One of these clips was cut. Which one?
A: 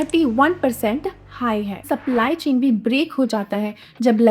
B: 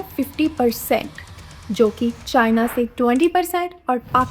A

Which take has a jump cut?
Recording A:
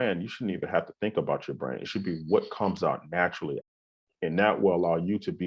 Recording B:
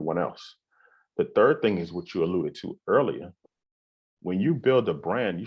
A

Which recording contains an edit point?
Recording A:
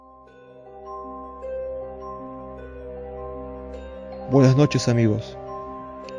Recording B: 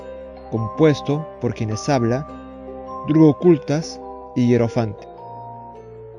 B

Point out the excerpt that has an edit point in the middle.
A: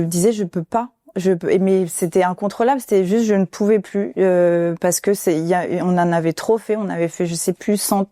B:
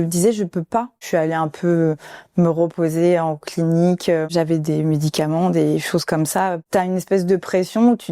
B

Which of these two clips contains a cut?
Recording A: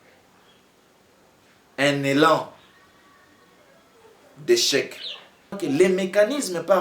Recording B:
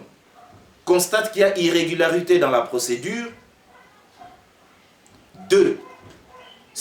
A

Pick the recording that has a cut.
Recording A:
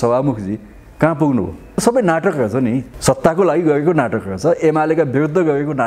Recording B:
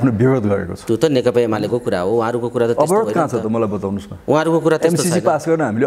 A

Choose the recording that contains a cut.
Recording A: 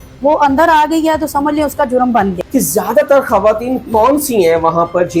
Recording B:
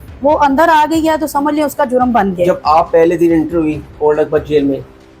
A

